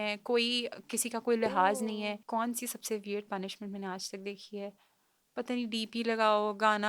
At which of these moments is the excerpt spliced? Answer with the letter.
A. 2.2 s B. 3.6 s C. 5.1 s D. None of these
A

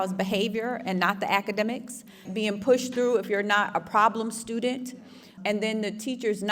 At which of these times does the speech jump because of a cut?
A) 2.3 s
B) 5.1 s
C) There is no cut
A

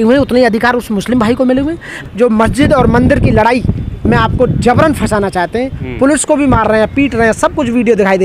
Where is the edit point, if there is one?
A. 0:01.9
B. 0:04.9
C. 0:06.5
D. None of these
A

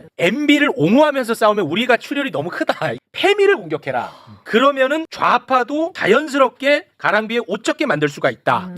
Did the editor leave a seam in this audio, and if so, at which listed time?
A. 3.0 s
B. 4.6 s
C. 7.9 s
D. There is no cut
A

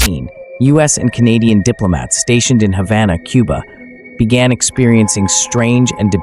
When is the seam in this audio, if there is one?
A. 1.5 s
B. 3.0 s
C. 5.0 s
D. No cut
D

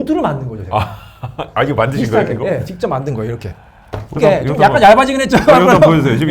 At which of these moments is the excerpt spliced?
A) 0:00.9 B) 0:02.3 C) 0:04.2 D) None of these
C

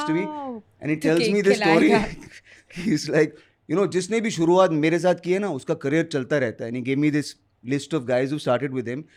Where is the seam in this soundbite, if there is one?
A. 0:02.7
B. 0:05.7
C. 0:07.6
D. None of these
D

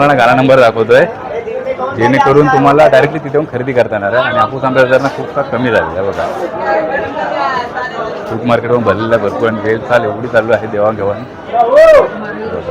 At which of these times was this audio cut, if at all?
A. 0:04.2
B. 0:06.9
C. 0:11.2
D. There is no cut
D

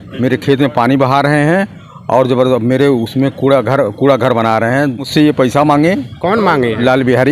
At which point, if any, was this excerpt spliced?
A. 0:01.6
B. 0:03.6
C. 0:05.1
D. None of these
C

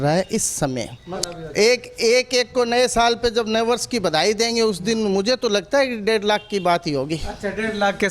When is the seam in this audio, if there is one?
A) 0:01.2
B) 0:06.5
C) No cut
A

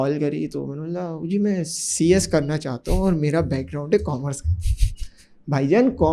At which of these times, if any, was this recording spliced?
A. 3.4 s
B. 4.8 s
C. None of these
C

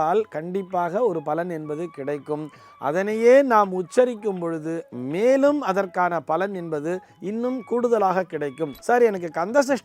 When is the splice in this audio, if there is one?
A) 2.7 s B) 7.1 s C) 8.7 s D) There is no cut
C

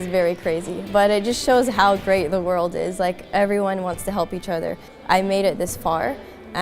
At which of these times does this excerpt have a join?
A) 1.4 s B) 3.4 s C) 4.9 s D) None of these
C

